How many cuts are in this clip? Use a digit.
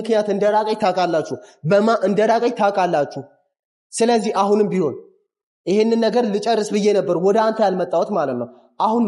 0